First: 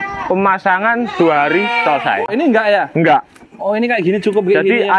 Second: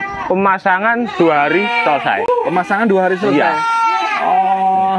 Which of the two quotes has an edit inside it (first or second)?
first